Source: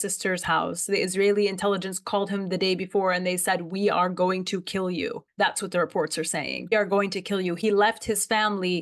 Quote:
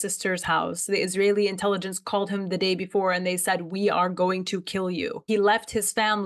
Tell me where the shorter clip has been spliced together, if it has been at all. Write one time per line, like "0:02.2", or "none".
0:05.2